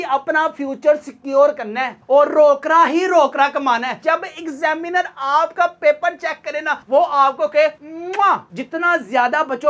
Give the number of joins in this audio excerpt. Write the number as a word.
two